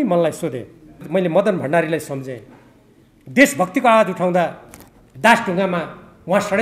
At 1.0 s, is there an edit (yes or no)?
yes